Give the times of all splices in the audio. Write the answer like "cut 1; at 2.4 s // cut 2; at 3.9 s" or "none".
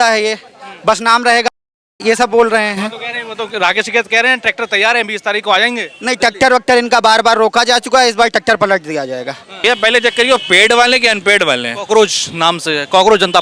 cut 1; at 9.6 s